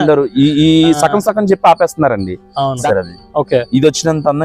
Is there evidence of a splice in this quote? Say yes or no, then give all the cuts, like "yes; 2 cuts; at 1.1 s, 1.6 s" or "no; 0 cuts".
yes; 1 cut; at 2.8 s